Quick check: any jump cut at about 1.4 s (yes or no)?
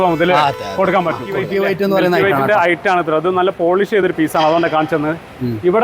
yes